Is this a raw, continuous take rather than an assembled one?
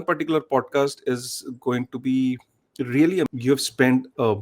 no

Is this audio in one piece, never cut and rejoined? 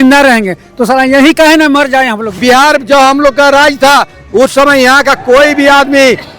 no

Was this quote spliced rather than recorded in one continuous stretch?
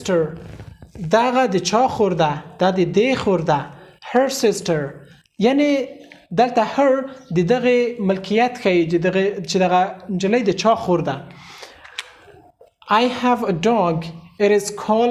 no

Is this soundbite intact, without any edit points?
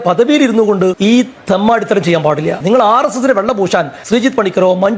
no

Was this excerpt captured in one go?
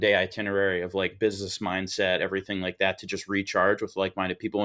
yes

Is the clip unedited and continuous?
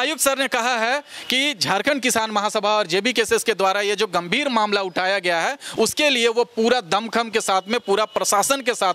yes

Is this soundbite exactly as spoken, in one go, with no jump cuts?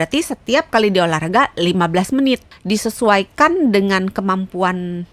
no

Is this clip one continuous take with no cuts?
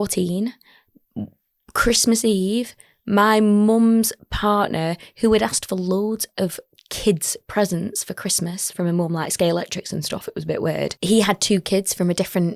no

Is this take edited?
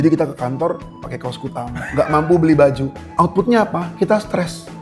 yes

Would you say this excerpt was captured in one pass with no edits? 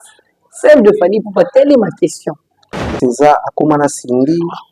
no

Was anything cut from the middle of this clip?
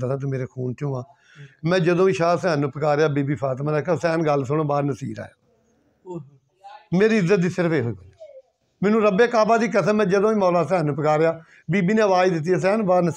no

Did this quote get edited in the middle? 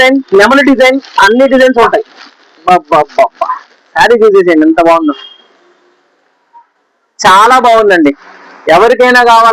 no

